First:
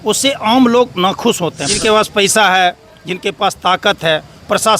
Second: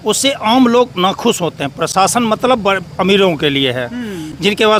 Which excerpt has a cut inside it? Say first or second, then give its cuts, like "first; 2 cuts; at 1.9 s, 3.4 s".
first; 1 cut; at 1.7 s